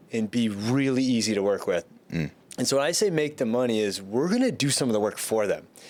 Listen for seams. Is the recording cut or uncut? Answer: uncut